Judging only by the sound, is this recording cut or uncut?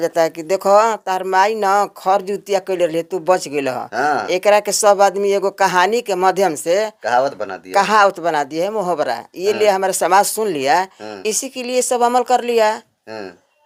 uncut